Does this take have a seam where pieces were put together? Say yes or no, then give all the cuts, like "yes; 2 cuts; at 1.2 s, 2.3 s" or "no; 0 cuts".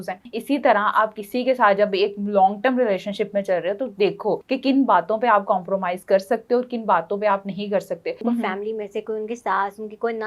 yes; 2 cuts; at 4.4 s, 8.2 s